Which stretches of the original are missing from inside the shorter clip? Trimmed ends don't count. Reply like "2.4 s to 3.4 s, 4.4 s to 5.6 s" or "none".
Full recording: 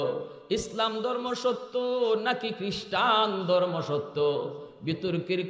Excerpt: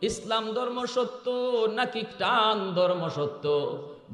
2.6 s to 2.8 s

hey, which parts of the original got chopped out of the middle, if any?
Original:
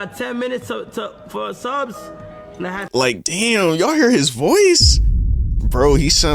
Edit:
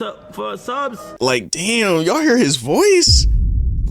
2.1 s to 2.9 s

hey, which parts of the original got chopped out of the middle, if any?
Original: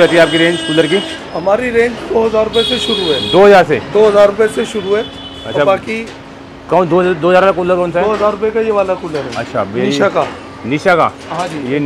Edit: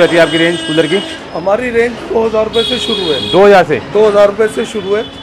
none

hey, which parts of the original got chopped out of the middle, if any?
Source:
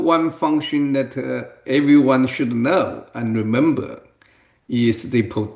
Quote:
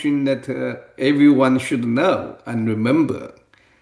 none

